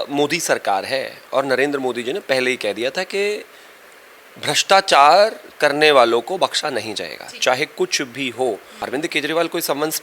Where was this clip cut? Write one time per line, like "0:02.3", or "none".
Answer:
0:08.8